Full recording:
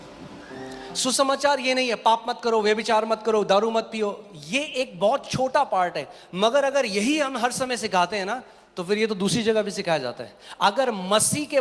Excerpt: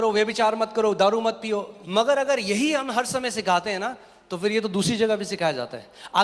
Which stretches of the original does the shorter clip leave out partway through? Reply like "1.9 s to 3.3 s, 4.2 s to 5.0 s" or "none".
4.3 s to 6.2 s